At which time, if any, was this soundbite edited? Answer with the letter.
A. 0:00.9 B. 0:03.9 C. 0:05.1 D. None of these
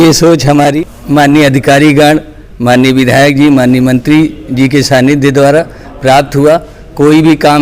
A